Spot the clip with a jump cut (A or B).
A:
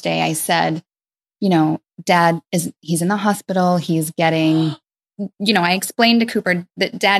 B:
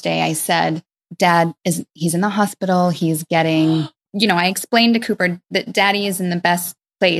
B